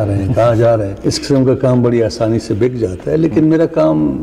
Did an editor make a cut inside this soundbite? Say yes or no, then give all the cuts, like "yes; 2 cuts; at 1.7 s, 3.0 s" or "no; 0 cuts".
yes; 1 cut; at 0.9 s